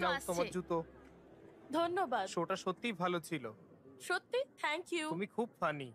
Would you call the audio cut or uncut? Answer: uncut